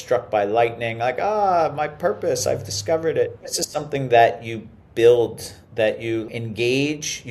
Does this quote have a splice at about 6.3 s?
yes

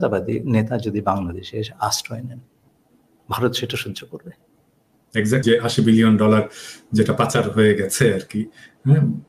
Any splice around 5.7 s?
yes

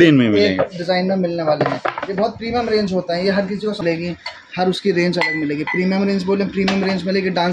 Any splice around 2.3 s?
no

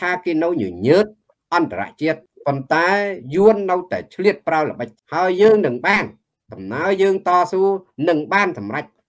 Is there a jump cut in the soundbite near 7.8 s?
no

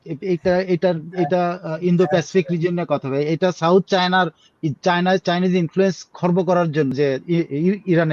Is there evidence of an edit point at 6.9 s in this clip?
yes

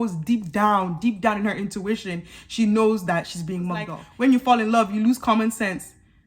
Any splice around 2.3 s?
no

